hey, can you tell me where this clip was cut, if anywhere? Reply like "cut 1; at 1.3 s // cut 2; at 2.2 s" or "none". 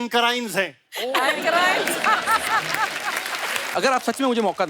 cut 1; at 3.6 s